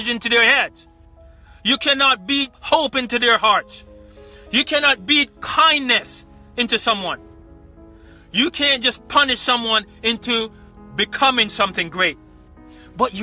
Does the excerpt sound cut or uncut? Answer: uncut